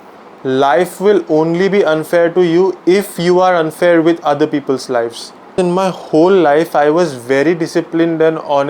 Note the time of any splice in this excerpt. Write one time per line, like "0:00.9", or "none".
0:05.5